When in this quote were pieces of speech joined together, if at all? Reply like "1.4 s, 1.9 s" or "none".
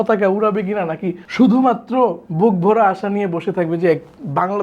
1.2 s